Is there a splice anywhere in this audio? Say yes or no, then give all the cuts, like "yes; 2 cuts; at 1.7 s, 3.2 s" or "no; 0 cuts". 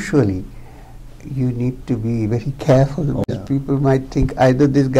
yes; 1 cut; at 3.3 s